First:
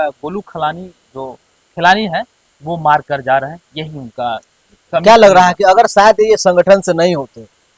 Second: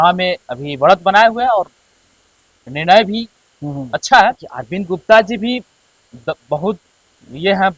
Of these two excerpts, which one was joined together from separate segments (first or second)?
second